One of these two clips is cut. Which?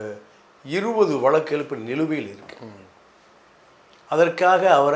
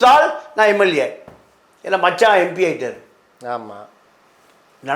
second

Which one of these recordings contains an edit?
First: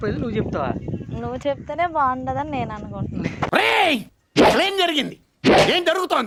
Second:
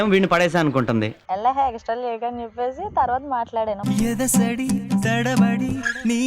second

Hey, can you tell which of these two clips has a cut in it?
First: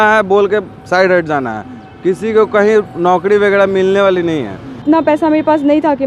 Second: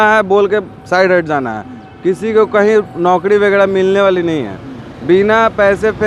first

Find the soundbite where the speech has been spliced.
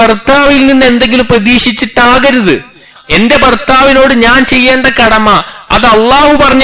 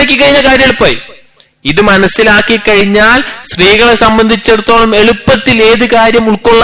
first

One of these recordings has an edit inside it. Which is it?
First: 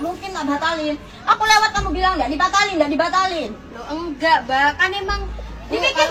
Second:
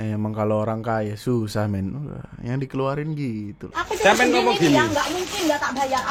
second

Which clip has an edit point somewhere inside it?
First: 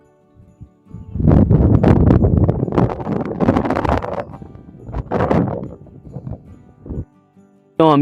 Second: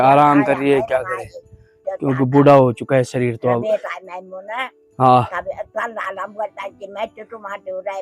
first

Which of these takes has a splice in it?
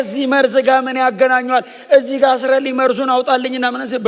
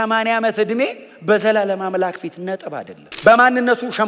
second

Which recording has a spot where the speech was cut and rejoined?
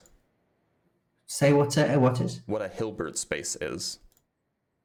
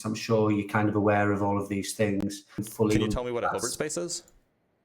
second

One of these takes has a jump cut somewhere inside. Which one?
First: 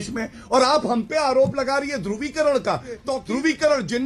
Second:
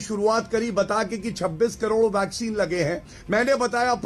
first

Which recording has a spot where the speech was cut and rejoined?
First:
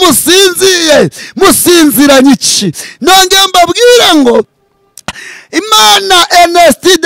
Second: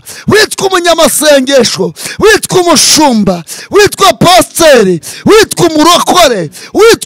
first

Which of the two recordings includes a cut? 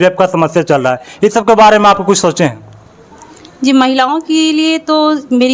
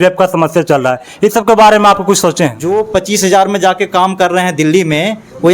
second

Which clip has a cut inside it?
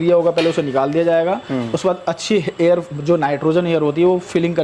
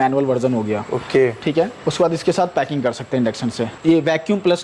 second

